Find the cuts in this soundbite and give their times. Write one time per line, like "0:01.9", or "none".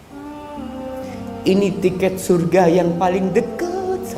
0:00.9